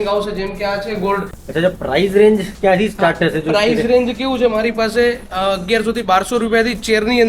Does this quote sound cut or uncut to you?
cut